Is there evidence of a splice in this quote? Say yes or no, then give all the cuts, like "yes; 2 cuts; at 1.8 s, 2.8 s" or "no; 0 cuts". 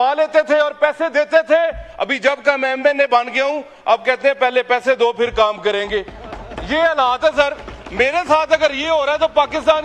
no; 0 cuts